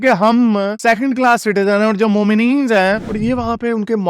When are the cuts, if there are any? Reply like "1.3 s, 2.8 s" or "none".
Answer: 3.0 s

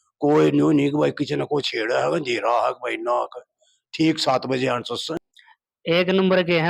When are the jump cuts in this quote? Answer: 5.2 s

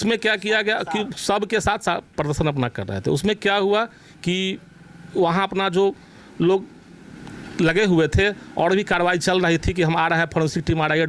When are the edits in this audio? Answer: none

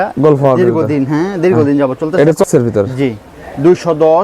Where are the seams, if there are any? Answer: 2.4 s

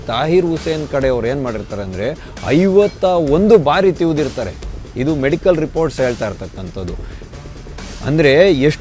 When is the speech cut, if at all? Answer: none

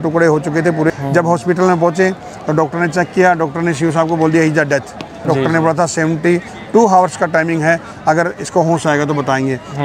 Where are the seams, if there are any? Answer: 0.9 s, 5.2 s

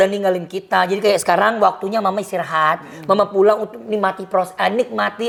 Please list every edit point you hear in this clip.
none

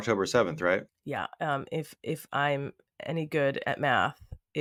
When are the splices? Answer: none

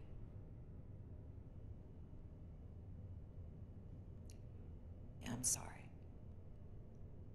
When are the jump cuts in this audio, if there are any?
5.9 s

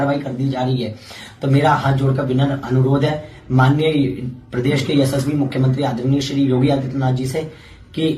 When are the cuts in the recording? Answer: none

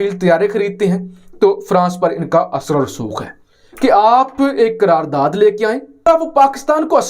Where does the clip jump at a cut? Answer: 6.1 s

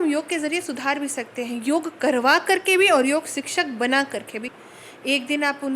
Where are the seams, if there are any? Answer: 4.6 s

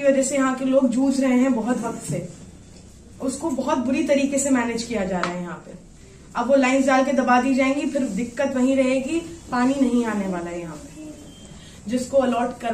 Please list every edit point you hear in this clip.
11.5 s

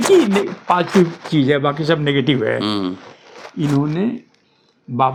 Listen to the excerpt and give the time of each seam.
none

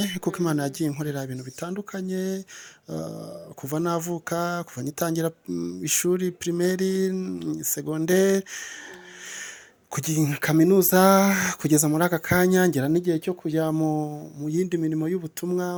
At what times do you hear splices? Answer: none

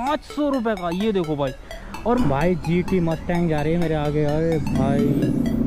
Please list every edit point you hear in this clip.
2.2 s

